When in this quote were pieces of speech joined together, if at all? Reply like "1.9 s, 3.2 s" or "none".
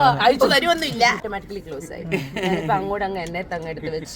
1.2 s

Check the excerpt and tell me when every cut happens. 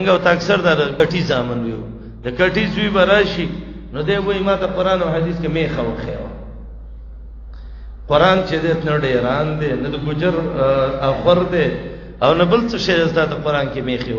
1.0 s

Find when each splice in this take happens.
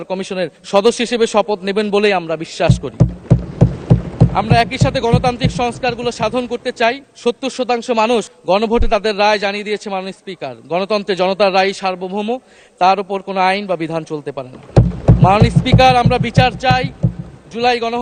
none

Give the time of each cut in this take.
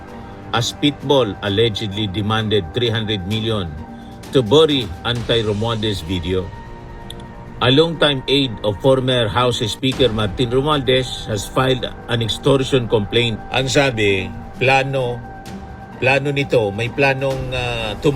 13.3 s

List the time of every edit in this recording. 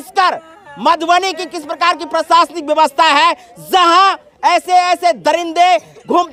none

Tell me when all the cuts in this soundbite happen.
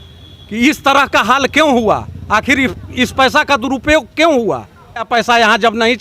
none

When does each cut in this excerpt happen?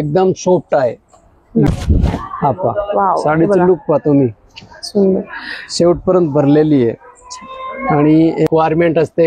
1.7 s, 8.5 s

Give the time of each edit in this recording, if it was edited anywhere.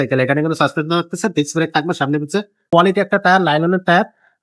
2.6 s

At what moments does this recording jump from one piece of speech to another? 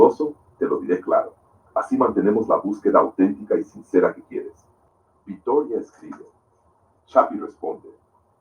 4.7 s

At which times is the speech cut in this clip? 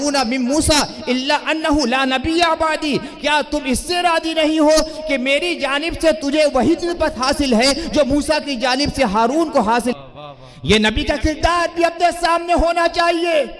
10.0 s

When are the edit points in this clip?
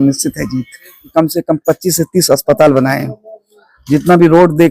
1.0 s

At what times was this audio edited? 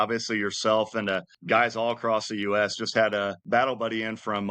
1.3 s, 3.4 s

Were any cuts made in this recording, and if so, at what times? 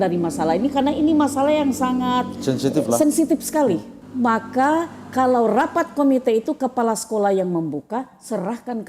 4.0 s

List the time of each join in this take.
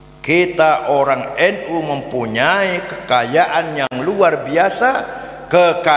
none

